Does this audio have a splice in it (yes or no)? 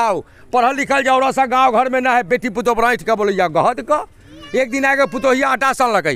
no